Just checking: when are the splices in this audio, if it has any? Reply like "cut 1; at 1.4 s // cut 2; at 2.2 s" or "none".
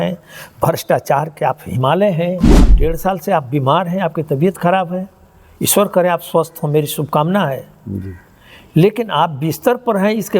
cut 1; at 2.8 s